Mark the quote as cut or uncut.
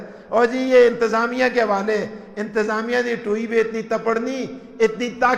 uncut